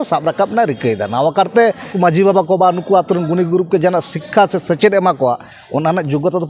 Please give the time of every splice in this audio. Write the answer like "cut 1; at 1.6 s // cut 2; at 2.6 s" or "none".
cut 1; at 1.9 s